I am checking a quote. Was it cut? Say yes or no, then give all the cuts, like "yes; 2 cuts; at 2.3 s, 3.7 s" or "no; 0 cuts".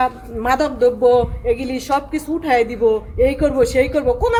no; 0 cuts